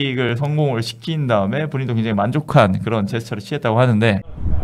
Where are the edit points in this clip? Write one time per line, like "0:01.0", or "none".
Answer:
none